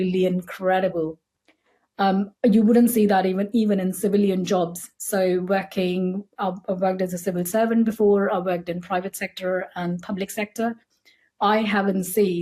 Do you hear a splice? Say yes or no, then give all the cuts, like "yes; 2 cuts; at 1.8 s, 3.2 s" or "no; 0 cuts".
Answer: no; 0 cuts